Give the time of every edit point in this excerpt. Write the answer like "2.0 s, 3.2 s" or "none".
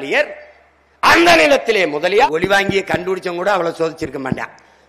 2.3 s